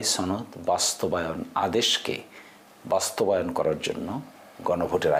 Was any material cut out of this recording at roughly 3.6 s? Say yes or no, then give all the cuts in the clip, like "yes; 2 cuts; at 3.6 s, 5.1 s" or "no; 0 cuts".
no; 0 cuts